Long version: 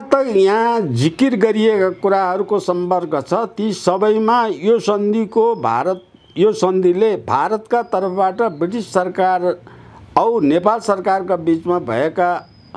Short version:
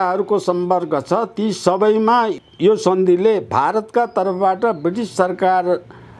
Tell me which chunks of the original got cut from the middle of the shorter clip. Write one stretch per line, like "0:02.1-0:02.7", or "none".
0:04.5-0:06.1